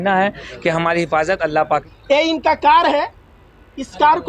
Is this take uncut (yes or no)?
no